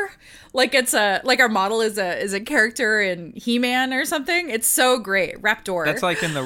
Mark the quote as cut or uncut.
uncut